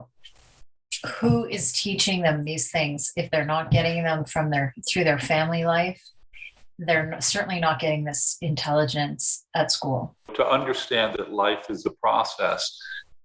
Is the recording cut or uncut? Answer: cut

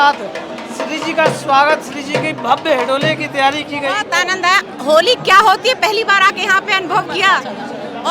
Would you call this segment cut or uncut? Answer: cut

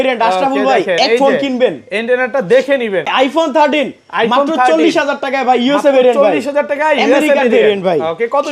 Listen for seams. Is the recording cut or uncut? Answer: cut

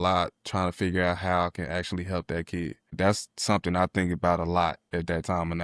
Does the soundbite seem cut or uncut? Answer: cut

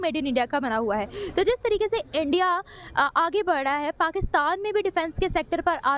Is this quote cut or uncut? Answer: uncut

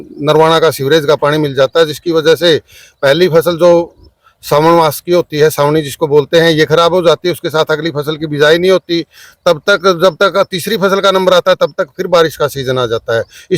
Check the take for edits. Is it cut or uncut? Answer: uncut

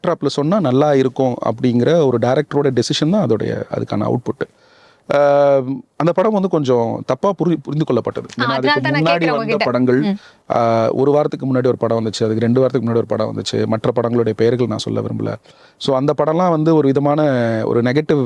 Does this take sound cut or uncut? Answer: uncut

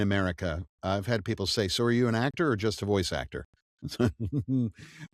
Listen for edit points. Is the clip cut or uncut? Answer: uncut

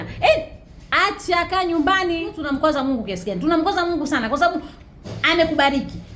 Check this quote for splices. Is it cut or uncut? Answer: cut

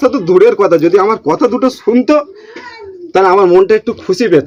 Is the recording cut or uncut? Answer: uncut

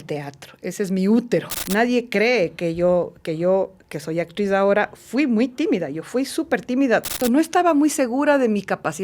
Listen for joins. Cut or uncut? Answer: cut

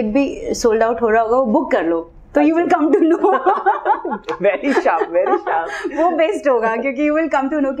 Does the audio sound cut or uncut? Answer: uncut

